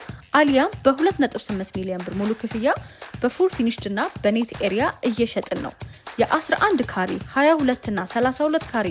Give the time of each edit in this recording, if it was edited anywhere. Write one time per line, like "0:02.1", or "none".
none